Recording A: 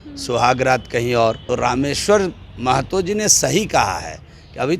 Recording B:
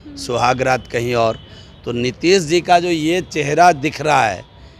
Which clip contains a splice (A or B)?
A